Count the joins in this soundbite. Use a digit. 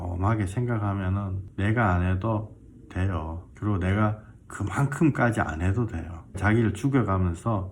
3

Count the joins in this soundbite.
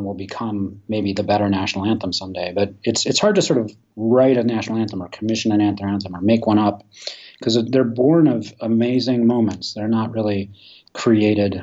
0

